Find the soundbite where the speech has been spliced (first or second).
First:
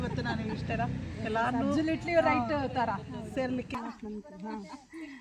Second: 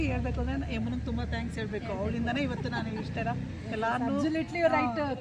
first